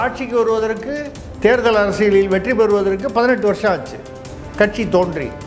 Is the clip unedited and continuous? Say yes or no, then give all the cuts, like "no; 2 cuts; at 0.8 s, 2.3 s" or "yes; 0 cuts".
yes; 0 cuts